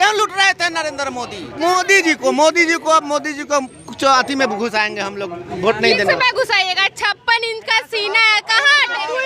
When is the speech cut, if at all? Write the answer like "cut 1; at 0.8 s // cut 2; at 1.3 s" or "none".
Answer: cut 1; at 1.4 s